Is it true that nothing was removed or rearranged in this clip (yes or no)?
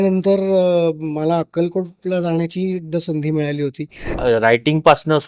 no